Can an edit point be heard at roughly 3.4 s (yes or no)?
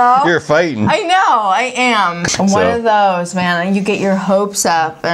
no